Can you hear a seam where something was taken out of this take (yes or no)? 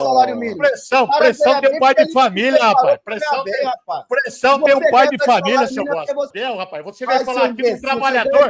yes